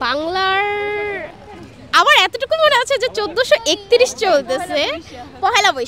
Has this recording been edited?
no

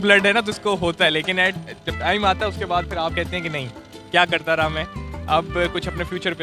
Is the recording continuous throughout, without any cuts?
yes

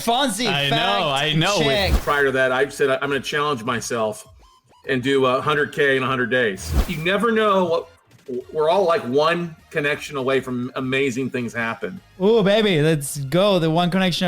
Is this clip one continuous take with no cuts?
no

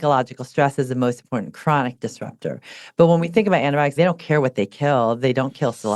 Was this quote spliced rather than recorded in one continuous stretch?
yes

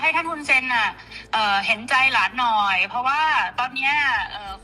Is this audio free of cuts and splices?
yes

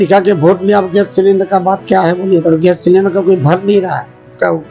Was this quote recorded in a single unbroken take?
yes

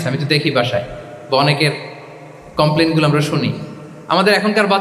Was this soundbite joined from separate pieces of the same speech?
no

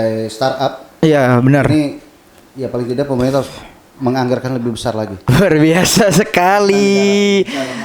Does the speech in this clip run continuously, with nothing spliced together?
no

